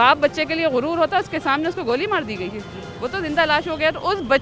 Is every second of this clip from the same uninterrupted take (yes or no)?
yes